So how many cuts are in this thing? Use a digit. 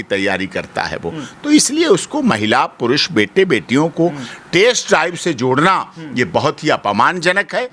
0